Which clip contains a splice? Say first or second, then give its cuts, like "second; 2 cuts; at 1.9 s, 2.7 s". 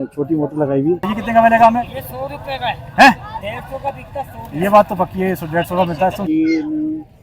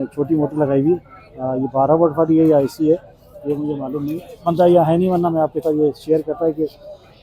first; 2 cuts; at 1.2 s, 6.2 s